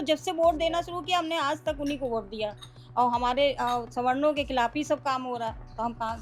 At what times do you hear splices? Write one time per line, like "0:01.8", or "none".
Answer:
none

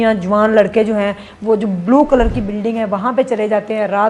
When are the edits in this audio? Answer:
none

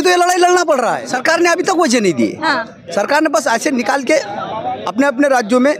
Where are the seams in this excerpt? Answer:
0:01.0

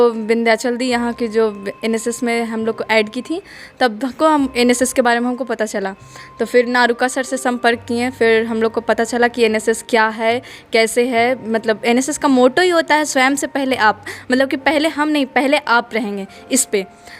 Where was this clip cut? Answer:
none

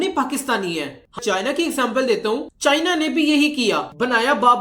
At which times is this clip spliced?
0:01.1

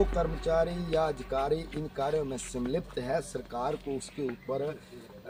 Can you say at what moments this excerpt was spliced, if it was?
none

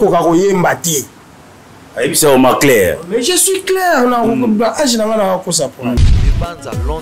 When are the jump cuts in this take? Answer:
0:06.0

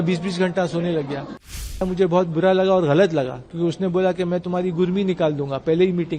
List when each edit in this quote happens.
0:01.8

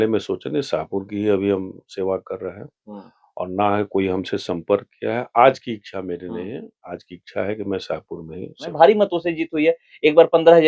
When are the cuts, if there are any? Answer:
0:08.7

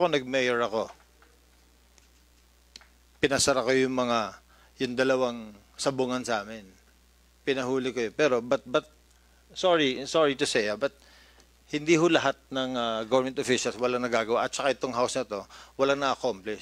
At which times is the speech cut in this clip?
0:12.6

